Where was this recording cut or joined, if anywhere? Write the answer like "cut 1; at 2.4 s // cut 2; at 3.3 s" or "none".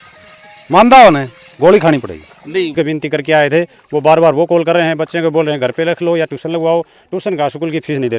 cut 1; at 2.7 s